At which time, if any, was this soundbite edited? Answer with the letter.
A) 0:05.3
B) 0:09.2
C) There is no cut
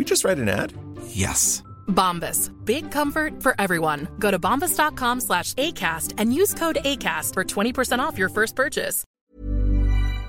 B